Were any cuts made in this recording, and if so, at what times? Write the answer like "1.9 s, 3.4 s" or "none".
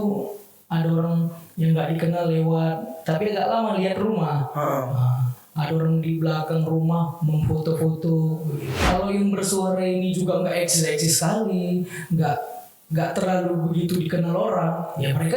8.7 s